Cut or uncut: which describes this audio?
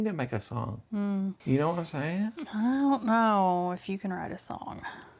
cut